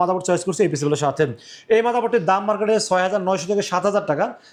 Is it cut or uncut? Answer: uncut